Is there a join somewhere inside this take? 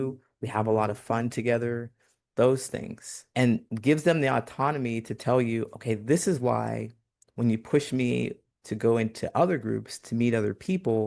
no; 0 cuts

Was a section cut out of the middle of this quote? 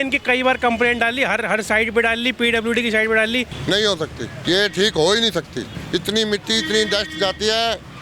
yes; 3 cuts; at 3.5 s, 4.4 s, 5.8 s

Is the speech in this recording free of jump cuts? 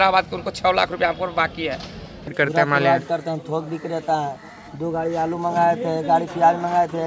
no; 1 cut; at 2.3 s

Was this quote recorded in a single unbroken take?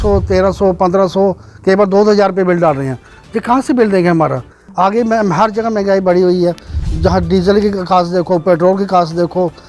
yes; 0 cuts

